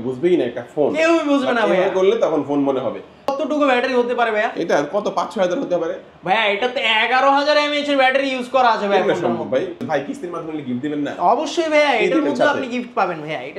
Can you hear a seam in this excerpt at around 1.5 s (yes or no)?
no